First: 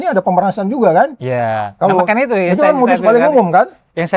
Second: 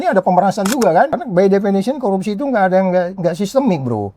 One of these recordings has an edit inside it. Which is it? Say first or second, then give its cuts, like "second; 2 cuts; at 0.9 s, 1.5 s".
second; 1 cut; at 1.2 s